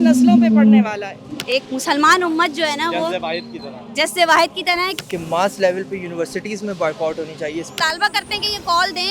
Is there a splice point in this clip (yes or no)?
yes